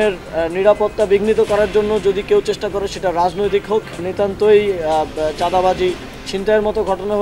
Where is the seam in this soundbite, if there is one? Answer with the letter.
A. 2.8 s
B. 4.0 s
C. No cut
B